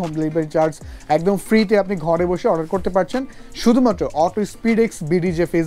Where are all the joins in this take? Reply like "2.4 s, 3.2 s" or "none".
none

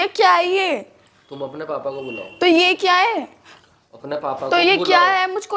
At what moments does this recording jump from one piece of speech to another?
none

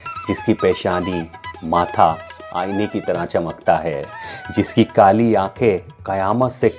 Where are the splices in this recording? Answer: 4.2 s

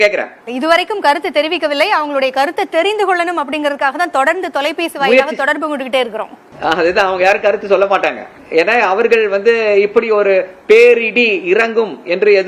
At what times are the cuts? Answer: none

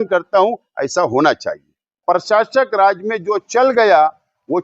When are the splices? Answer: 1.9 s

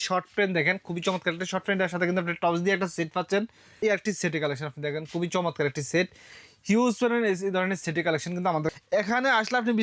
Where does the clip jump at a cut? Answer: 3.7 s, 8.7 s

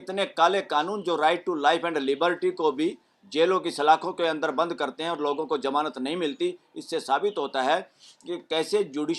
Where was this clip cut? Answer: none

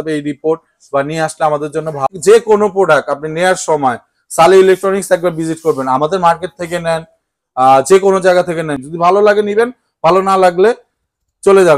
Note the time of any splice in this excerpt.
2.1 s, 8.8 s

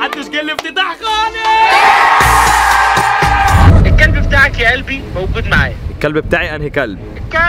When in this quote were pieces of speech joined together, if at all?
3.7 s

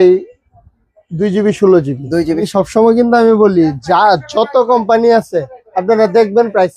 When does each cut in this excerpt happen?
2.5 s

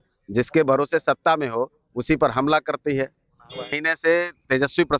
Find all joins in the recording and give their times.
3.8 s

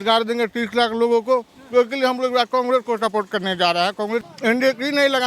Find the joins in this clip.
4.3 s

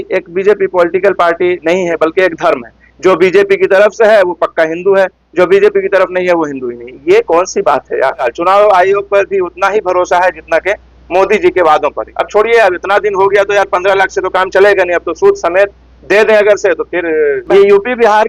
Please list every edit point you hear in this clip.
1.9 s, 8.3 s, 12.1 s, 17.4 s

